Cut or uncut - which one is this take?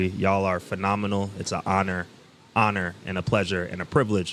uncut